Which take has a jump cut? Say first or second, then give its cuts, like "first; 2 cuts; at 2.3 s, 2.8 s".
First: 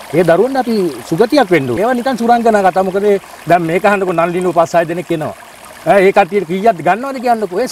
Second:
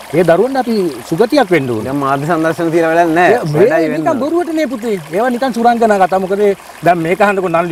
first; 1 cut; at 1.7 s